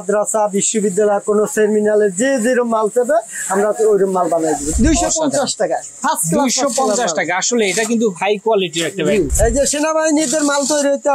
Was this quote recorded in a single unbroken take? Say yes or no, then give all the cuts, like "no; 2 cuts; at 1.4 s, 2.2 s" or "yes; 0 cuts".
no; 2 cuts; at 4.7 s, 9.3 s